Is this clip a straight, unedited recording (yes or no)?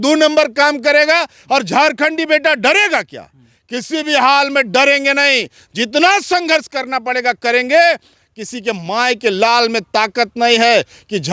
yes